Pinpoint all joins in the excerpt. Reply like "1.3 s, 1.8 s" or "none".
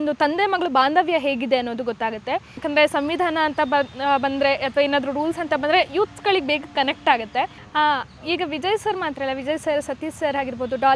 2.6 s, 7.6 s